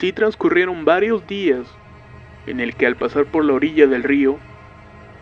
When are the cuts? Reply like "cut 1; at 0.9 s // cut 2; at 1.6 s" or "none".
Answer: cut 1; at 1.0 s